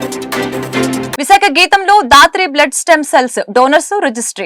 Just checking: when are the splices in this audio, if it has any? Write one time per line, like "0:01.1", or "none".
0:01.1